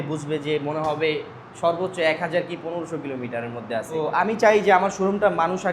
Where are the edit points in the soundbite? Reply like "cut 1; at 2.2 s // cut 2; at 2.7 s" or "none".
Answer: cut 1; at 4.0 s